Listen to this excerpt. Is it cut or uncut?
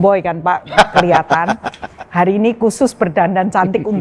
uncut